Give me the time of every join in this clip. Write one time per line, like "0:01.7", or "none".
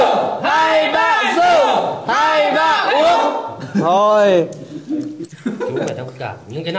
0:05.2